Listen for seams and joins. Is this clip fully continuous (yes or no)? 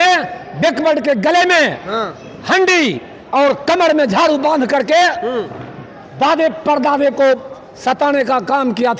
yes